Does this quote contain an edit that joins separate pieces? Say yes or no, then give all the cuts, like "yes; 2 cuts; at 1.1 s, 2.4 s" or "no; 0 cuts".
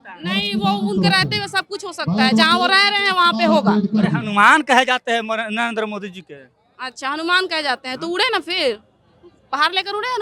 no; 0 cuts